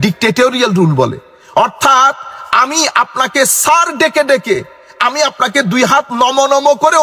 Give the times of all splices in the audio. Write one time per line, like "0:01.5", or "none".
none